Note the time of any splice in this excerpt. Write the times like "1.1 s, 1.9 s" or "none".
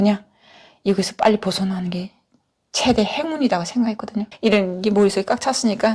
4.3 s